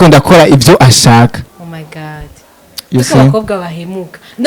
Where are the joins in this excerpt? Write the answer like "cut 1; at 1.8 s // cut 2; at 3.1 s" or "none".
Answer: none